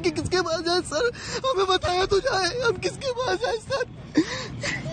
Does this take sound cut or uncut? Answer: uncut